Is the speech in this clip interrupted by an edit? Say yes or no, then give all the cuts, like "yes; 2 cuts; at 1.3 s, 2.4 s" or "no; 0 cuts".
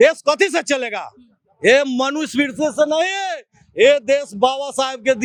no; 0 cuts